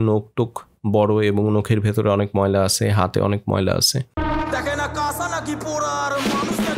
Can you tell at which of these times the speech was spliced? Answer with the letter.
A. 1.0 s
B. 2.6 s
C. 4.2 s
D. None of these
C